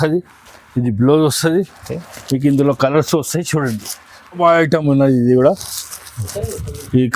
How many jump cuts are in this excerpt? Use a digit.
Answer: 1